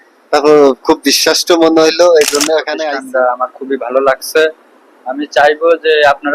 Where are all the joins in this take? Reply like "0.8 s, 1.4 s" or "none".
2.7 s

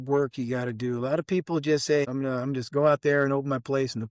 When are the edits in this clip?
2.1 s

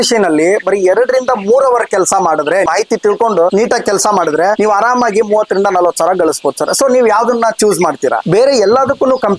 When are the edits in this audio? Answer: none

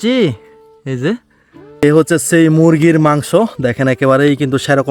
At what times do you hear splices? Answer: 1.8 s

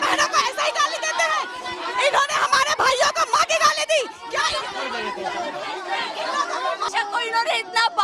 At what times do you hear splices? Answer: 6.9 s

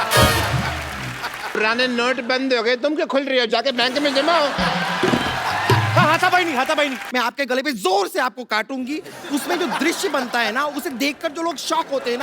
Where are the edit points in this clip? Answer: 1.6 s, 7.0 s

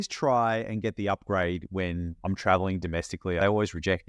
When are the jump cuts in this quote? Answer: 2.1 s, 3.4 s

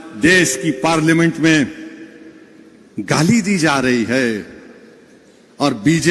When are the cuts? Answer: none

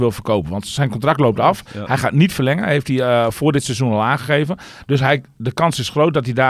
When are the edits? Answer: none

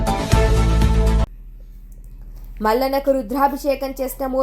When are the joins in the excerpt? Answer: 1.2 s

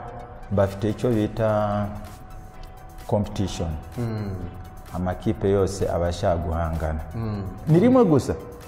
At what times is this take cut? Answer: 7.6 s

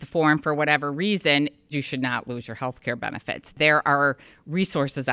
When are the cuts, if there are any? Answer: 1.7 s, 3.5 s

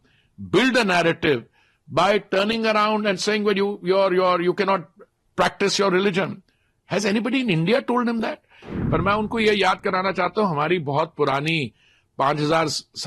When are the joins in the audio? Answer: 8.6 s

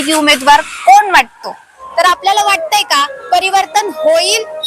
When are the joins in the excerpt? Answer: 1.8 s

